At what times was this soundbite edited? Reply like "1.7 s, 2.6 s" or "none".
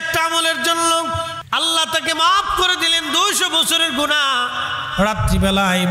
1.4 s